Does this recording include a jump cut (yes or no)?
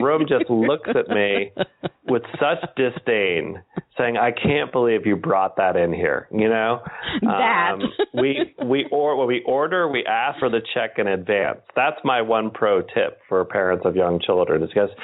yes